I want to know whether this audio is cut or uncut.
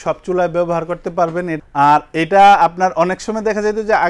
uncut